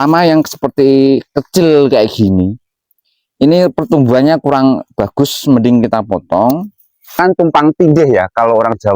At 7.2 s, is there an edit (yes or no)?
yes